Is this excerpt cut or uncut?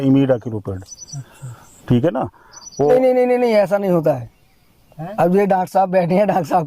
cut